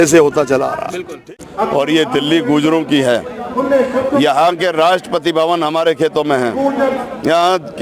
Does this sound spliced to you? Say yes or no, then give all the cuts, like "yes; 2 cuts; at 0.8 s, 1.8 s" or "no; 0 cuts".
yes; 1 cut; at 1.0 s